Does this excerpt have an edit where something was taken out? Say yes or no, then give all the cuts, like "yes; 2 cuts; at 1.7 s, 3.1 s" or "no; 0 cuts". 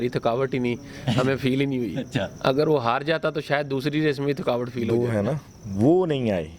yes; 1 cut; at 4.8 s